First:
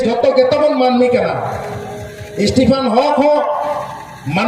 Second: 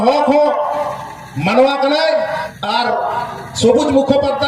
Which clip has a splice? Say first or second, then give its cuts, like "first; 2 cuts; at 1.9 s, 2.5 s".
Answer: second; 1 cut; at 2.5 s